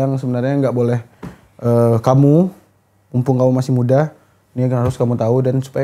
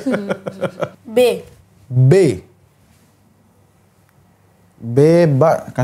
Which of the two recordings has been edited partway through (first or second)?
second